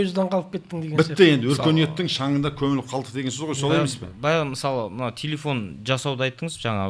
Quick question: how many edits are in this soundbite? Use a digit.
0